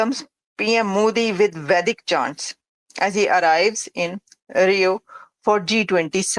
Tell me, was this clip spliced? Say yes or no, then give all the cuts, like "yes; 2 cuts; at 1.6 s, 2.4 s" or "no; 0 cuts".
no; 0 cuts